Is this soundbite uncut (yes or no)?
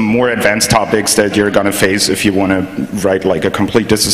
yes